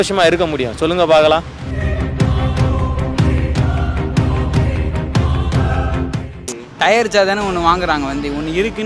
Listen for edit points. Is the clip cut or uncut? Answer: cut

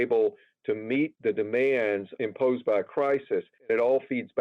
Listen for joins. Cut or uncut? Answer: cut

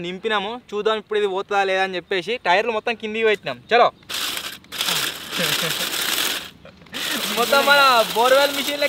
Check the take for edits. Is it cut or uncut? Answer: uncut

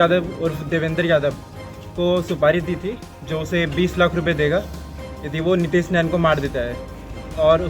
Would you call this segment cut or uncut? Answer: uncut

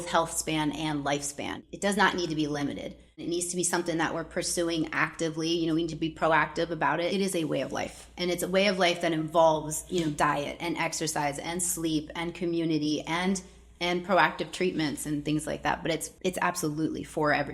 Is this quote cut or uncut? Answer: cut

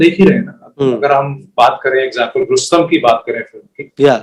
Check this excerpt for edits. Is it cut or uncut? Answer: uncut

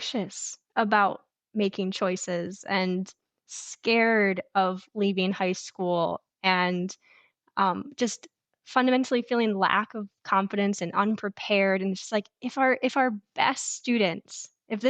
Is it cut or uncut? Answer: uncut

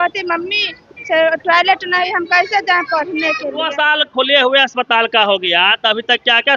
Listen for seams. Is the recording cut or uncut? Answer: cut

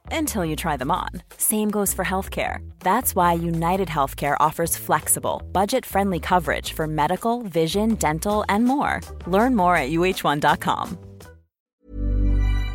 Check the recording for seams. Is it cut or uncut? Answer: cut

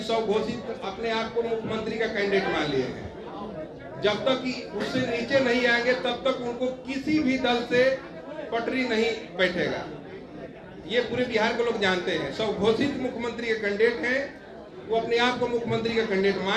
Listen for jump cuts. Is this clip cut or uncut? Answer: uncut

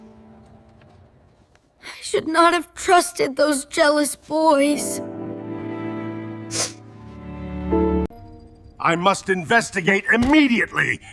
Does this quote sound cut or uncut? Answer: cut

